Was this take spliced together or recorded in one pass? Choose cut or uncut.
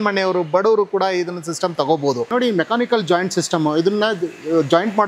cut